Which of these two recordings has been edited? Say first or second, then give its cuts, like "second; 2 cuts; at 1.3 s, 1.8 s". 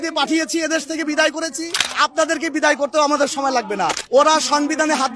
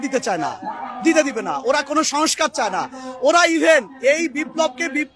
first; 1 cut; at 4.0 s